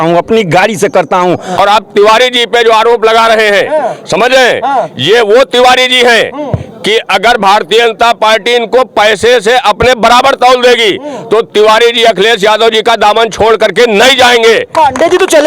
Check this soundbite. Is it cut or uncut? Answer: cut